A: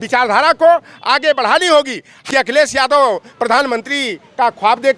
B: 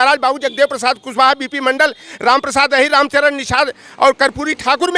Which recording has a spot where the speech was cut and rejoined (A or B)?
A